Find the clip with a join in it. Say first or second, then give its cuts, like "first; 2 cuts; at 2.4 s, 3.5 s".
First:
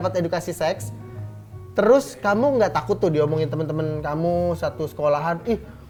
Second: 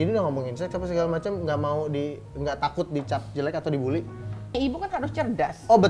second; 1 cut; at 4.5 s